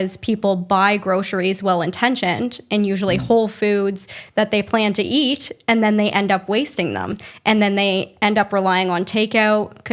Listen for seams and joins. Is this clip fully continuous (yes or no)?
yes